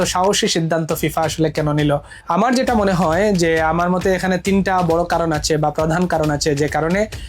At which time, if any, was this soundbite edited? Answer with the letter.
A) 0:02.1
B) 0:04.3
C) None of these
A